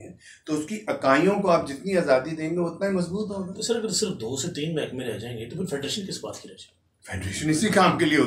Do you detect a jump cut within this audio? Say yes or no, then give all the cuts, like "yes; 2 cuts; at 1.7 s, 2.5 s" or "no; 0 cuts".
no; 0 cuts